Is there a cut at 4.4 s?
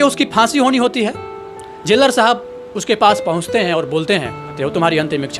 yes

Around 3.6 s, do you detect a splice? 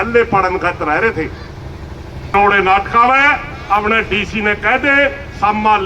no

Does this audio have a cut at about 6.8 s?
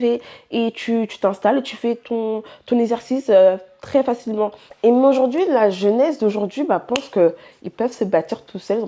no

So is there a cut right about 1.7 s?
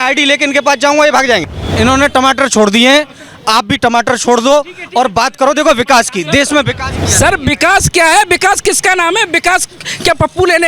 yes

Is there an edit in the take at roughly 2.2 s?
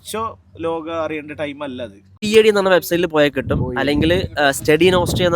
yes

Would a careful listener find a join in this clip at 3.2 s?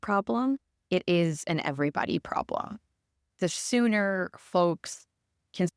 yes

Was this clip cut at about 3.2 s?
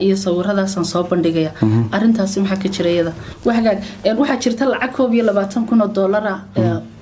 yes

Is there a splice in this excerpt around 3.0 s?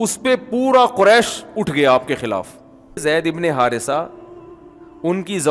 yes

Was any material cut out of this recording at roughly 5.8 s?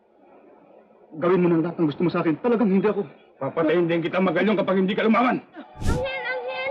yes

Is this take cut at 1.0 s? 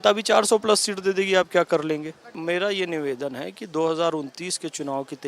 no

